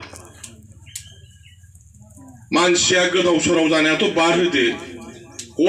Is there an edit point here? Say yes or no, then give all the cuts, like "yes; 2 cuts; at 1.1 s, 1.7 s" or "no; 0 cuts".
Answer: no; 0 cuts